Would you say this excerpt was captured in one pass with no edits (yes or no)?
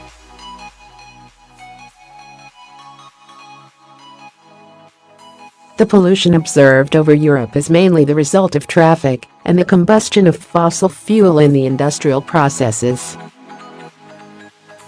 yes